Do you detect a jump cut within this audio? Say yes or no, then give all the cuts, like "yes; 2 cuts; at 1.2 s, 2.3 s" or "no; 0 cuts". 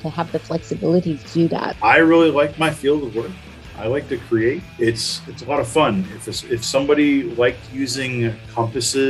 yes; 2 cuts; at 1.7 s, 4.7 s